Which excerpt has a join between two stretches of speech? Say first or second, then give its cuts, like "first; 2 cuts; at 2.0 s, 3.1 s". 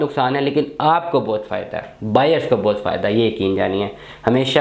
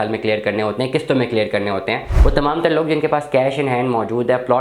second; 1 cut; at 2.1 s